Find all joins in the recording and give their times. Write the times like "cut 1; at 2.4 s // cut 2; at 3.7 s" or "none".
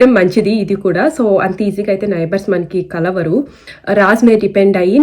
cut 1; at 3.7 s